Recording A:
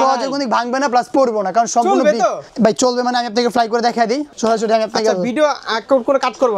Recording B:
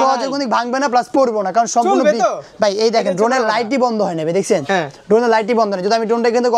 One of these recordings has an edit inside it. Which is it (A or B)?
A